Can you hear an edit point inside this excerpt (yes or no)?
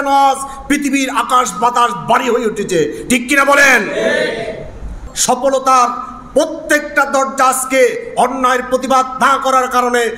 yes